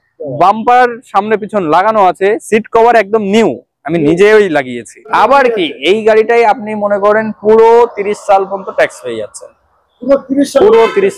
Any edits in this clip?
yes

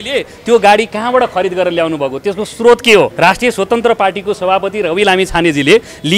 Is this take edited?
yes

